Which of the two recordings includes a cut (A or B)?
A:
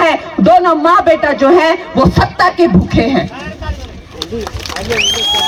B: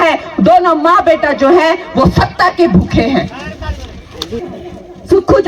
B